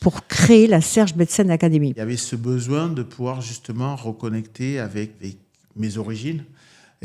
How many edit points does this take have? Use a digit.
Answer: 2